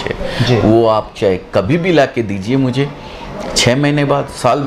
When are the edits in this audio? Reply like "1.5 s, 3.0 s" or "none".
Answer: none